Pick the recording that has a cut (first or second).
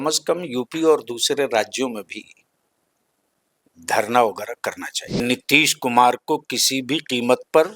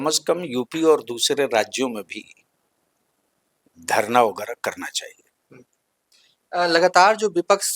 first